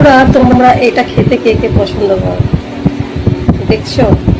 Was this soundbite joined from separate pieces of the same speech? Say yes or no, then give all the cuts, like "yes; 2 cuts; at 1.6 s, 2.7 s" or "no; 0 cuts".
no; 0 cuts